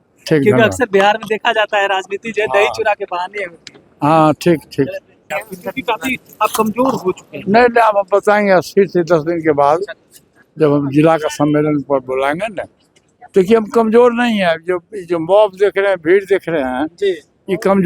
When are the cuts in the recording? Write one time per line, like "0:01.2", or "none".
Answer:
0:05.3

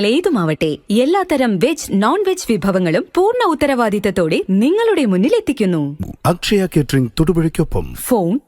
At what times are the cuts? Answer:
0:06.0

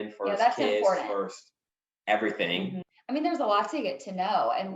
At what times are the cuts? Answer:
0:02.8

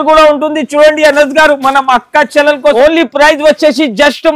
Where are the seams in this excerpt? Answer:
0:02.7

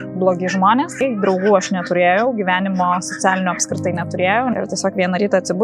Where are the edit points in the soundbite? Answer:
0:01.0
0:04.5

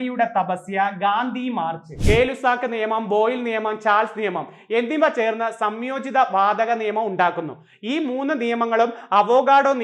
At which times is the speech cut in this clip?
0:01.9

